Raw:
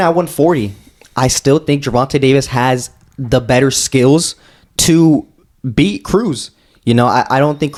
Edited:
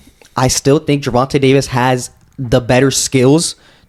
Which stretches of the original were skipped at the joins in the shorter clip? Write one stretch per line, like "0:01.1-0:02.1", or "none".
none